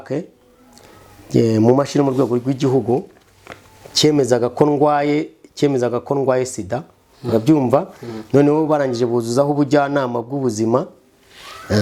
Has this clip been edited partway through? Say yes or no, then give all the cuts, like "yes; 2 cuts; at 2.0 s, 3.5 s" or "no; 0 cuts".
no; 0 cuts